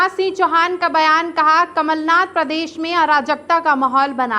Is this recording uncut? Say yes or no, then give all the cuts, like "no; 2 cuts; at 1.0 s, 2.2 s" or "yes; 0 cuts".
yes; 0 cuts